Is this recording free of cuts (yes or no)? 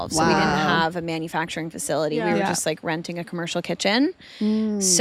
yes